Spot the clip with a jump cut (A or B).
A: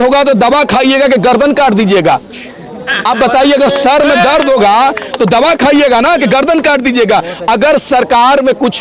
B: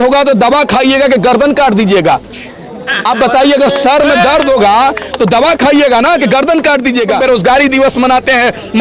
B